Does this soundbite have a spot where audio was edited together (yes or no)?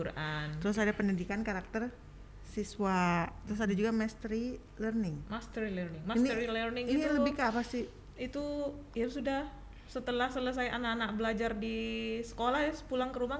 no